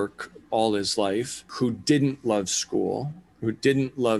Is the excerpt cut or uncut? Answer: cut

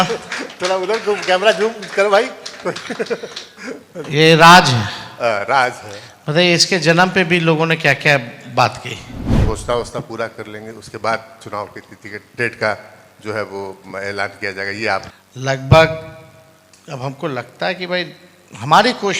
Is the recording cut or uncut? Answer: cut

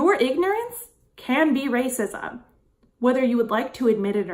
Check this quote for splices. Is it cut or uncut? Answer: uncut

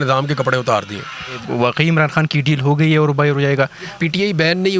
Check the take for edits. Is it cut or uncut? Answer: cut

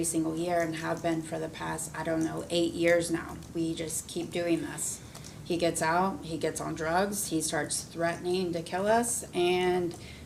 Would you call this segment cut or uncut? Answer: uncut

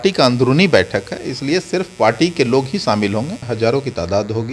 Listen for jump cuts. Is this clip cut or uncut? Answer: cut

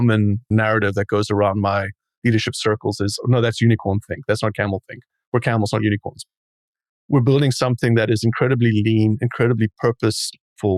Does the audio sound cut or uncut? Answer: uncut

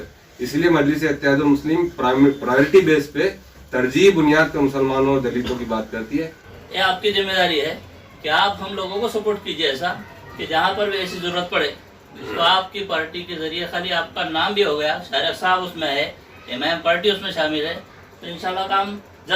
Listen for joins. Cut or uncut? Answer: cut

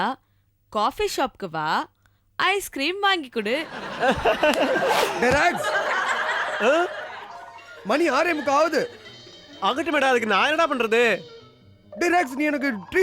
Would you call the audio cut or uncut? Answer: cut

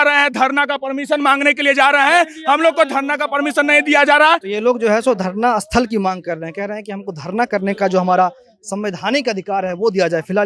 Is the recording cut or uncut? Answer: uncut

